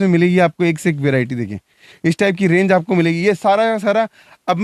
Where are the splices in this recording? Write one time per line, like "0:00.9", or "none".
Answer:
none